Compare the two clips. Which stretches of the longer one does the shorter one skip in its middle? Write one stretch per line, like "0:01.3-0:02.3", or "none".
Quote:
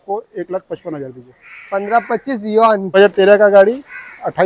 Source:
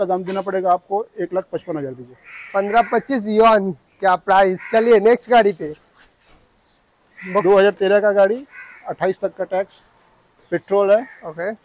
0:03.8-0:07.6